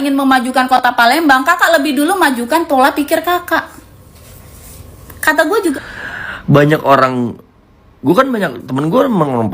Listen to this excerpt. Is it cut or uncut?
cut